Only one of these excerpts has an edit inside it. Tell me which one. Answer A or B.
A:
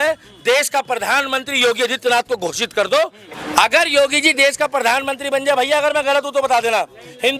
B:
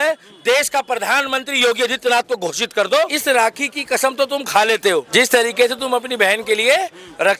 B